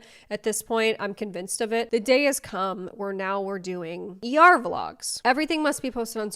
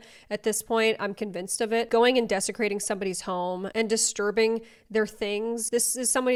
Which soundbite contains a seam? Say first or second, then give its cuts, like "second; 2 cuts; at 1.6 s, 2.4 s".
first; 2 cuts; at 1.9 s, 5.2 s